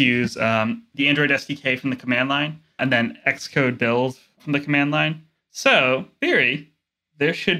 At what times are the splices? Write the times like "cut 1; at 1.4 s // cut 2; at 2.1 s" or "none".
cut 1; at 0.9 s // cut 2; at 2.8 s // cut 3; at 6.1 s